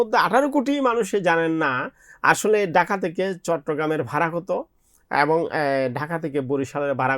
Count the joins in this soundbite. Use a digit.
0